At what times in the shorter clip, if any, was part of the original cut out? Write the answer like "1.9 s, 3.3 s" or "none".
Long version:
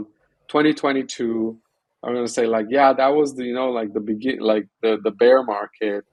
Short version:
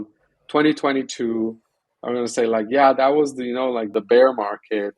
4.0 s